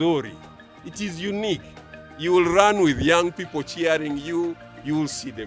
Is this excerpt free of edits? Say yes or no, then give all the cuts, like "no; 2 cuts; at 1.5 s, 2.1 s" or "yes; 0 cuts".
yes; 0 cuts